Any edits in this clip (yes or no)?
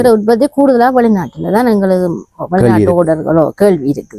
no